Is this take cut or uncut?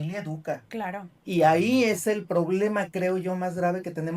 uncut